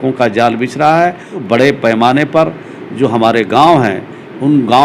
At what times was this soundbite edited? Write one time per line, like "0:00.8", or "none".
0:01.3